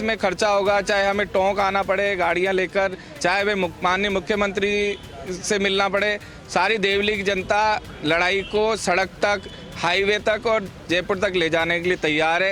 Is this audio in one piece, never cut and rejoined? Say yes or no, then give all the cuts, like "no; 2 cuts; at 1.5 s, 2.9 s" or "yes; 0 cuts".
yes; 0 cuts